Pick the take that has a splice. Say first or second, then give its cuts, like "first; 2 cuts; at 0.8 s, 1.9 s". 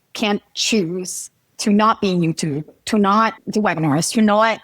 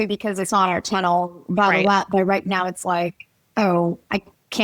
first; 1 cut; at 3.4 s